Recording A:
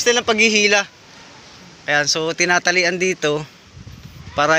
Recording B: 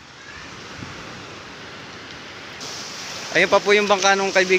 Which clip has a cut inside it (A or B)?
B